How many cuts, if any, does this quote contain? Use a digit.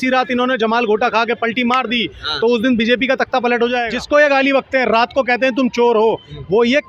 1